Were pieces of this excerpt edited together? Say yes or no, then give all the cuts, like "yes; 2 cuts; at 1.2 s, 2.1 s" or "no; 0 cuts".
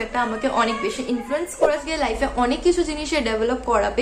yes; 1 cut; at 1.8 s